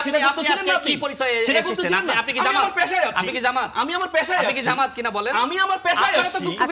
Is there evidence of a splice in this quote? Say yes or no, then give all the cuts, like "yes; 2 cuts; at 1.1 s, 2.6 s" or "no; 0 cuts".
no; 0 cuts